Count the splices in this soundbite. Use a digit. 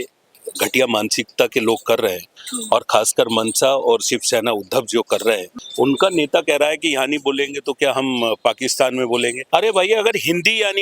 2